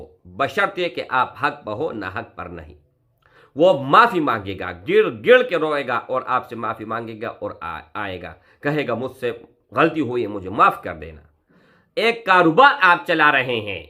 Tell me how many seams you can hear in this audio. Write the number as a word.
zero